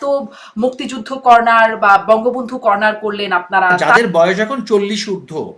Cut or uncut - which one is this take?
cut